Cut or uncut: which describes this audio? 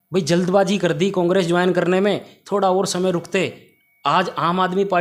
uncut